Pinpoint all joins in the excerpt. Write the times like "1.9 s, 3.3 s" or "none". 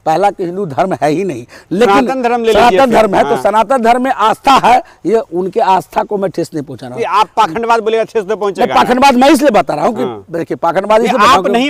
none